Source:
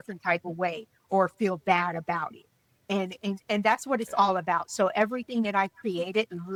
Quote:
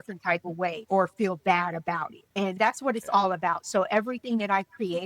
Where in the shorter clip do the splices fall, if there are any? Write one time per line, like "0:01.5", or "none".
0:00.8
0:02.6